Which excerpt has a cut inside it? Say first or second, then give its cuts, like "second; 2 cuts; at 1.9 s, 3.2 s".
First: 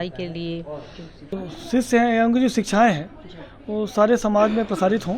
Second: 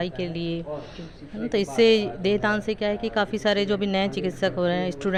first; 1 cut; at 1.4 s